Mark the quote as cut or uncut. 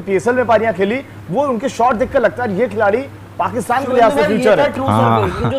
uncut